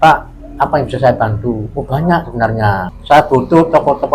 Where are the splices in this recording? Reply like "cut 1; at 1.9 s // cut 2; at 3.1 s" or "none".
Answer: cut 1; at 2.9 s